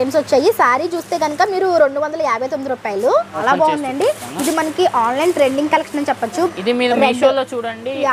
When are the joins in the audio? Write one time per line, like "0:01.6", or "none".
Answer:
0:03.4
0:06.5